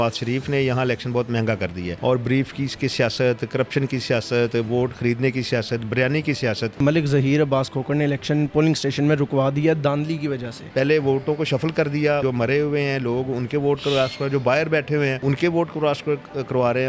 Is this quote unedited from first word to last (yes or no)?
no